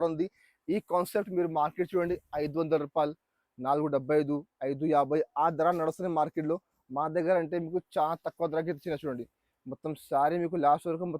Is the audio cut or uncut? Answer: uncut